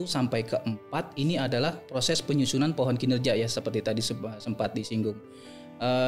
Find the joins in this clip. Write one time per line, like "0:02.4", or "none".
none